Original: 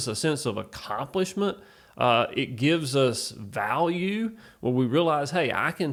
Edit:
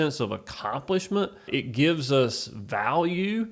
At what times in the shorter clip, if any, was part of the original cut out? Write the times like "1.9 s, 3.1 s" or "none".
1.5 s